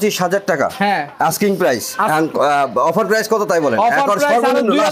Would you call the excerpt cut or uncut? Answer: uncut